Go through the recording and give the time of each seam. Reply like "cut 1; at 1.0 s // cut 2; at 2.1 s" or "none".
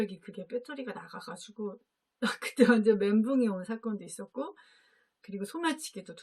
none